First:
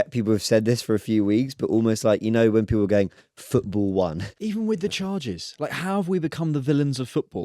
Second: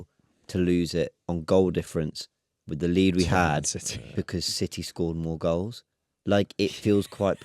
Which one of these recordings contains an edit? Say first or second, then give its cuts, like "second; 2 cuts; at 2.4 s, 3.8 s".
first; 1 cut; at 4.4 s